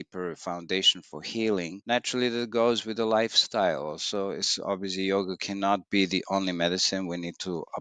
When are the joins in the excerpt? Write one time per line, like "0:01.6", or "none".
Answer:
none